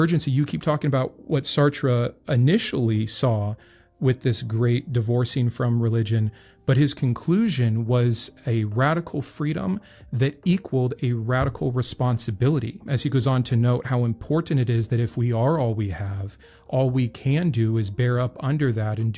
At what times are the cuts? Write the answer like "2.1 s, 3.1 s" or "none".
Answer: none